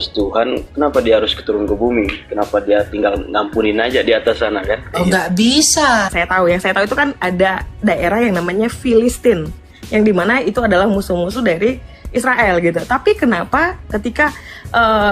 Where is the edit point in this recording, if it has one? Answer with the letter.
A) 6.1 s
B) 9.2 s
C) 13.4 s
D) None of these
A